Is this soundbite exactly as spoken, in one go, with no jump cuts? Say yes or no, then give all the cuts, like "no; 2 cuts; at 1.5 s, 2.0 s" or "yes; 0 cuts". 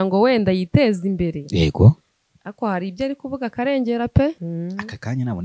no; 1 cut; at 4.4 s